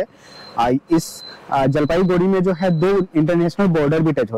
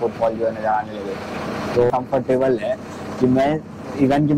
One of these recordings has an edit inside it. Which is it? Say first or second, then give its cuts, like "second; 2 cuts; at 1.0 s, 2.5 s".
second; 1 cut; at 1.9 s